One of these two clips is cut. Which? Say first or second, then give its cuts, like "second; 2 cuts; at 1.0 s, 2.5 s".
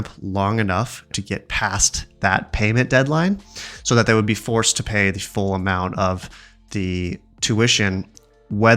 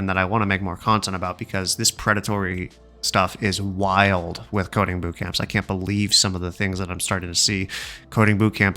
first; 1 cut; at 1.1 s